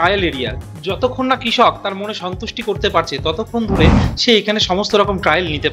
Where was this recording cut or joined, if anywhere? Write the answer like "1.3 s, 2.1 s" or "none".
none